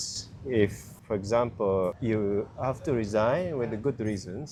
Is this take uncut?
yes; 0 cuts

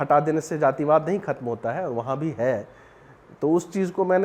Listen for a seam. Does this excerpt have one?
no; 0 cuts

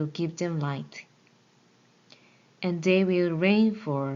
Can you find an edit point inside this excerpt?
no; 0 cuts

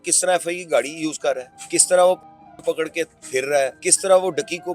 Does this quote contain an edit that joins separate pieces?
yes; 2 cuts; at 1.5 s, 3.8 s

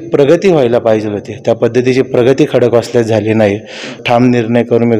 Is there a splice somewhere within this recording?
yes; 1 cut; at 4.0 s

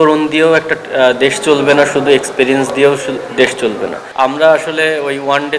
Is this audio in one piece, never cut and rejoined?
no; 1 cut; at 4.0 s

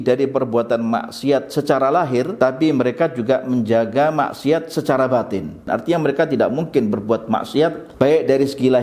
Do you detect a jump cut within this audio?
yes; 3 cuts; at 2.3 s, 5.6 s, 7.8 s

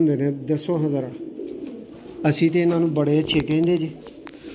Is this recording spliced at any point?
no; 0 cuts

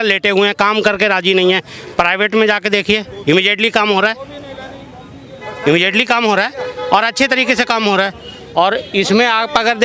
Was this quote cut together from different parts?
no; 0 cuts

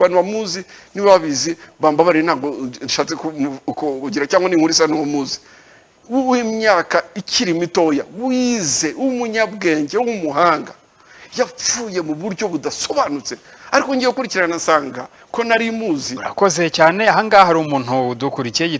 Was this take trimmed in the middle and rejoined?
yes; 1 cut; at 16.2 s

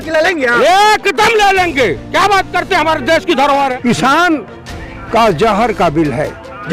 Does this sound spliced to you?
yes; 1 cut; at 3.7 s

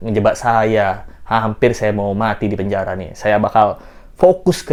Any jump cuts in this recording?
no; 0 cuts

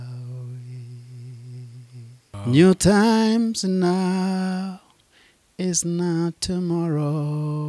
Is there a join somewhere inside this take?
yes; 1 cut; at 2.3 s

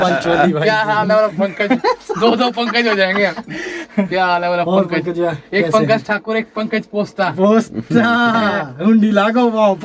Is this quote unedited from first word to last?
yes; 0 cuts

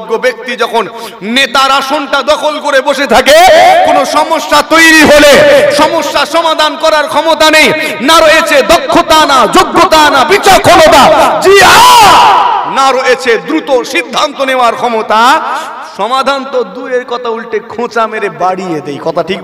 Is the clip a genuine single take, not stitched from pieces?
yes; 0 cuts

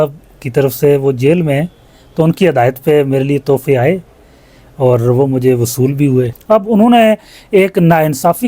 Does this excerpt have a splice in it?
yes; 1 cut; at 6.4 s

